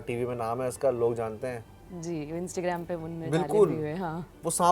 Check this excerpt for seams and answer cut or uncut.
cut